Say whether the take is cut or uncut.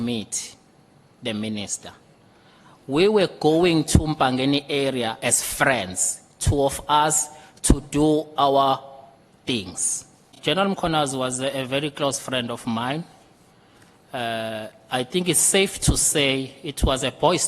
cut